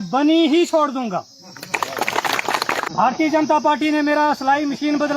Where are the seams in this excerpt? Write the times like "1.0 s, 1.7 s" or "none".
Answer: 2.9 s

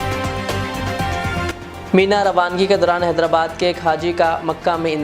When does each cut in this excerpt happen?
1.5 s

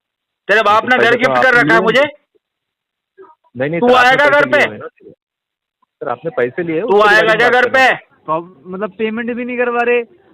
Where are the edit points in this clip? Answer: 8.1 s

